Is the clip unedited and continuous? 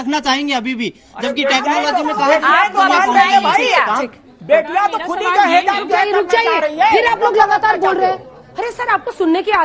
yes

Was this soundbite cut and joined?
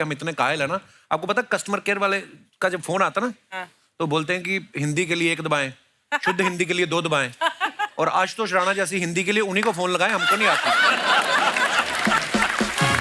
no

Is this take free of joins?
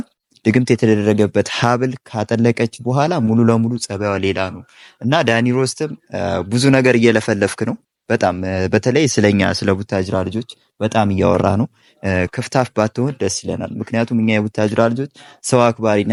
yes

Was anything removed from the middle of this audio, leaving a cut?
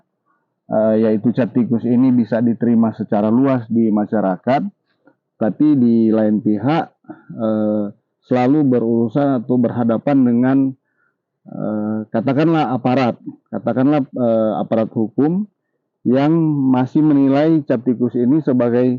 no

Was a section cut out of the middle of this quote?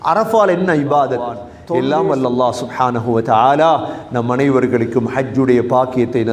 yes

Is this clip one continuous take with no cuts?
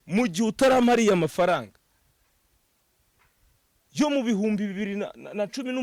yes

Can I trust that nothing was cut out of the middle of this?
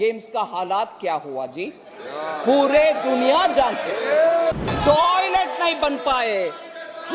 no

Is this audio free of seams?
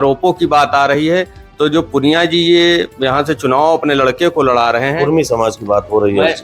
yes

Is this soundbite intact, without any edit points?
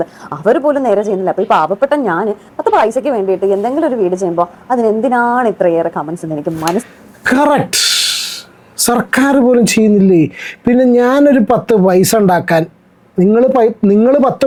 yes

